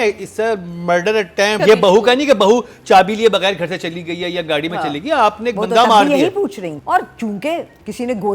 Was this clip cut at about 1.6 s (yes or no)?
yes